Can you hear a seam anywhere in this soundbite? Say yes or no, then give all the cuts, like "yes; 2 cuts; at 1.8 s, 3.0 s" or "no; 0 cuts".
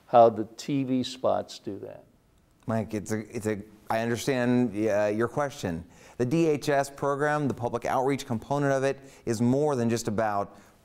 no; 0 cuts